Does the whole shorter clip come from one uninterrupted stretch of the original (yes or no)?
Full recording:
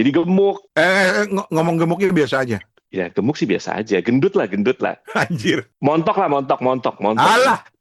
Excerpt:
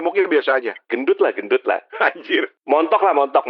no